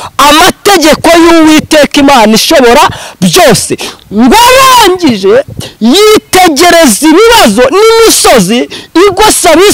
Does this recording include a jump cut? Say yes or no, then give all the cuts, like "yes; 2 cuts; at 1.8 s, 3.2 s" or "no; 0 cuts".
no; 0 cuts